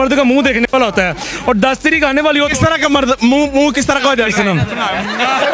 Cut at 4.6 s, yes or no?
no